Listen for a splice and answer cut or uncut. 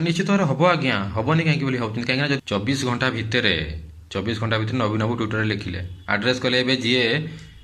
cut